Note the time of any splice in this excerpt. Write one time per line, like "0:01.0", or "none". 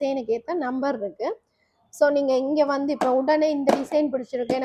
none